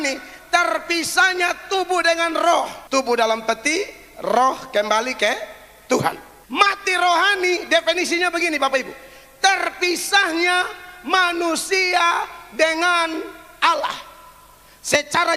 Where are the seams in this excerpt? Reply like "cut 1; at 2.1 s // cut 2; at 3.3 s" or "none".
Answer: cut 1; at 2.8 s // cut 2; at 6.3 s